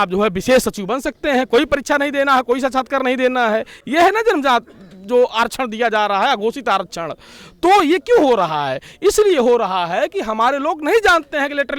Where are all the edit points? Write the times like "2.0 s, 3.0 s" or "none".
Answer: none